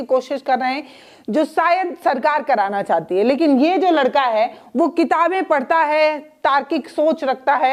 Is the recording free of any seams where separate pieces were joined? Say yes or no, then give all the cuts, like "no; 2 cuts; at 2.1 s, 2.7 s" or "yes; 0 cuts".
yes; 0 cuts